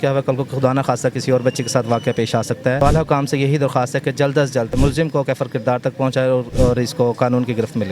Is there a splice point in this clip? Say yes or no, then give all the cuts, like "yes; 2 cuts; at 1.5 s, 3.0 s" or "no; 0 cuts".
yes; 3 cuts; at 2.8 s, 4.8 s, 6.5 s